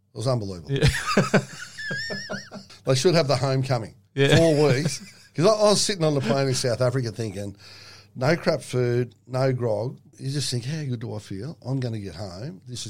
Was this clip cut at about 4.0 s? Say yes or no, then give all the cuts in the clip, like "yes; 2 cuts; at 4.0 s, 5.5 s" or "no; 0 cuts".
no; 2 cuts; at 2.7 s, 10.1 s